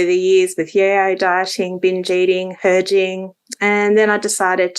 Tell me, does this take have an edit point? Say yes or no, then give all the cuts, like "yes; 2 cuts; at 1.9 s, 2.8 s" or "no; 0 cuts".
yes; 1 cut; at 2.5 s